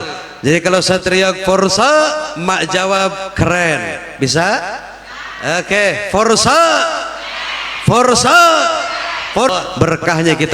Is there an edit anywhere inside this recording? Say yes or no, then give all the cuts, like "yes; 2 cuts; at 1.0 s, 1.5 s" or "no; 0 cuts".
yes; 1 cut; at 9.5 s